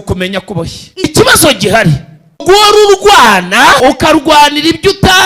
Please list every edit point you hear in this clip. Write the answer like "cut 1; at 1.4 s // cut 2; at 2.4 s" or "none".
cut 1; at 1.0 s // cut 2; at 2.4 s // cut 3; at 3.8 s